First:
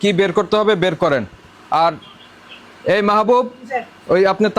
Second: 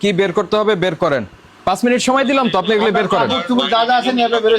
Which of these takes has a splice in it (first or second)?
second